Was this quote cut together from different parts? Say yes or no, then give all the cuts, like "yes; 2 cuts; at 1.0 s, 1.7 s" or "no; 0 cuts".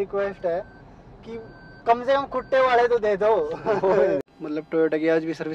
yes; 1 cut; at 4.2 s